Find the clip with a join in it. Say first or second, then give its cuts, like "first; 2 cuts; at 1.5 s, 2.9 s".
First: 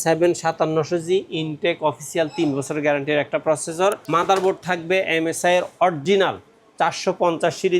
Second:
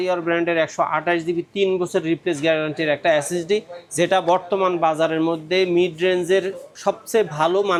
first; 1 cut; at 4.0 s